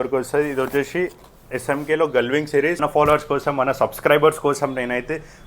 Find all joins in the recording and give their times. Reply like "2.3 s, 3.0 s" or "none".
2.8 s